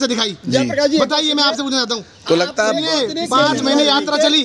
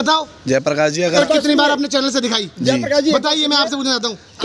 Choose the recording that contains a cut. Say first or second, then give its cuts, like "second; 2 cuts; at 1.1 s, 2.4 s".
second; 1 cut; at 1.1 s